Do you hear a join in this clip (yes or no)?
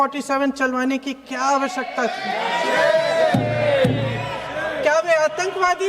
no